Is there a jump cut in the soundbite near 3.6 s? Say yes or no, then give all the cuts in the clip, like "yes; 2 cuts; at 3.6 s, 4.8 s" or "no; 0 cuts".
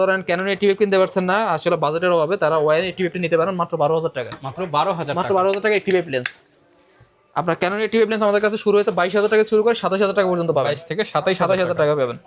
no; 0 cuts